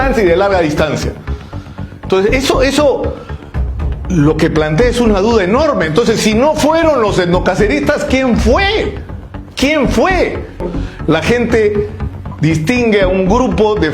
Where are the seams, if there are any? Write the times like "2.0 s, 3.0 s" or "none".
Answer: 10.7 s